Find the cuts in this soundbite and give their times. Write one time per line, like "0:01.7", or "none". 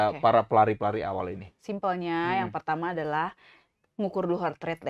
none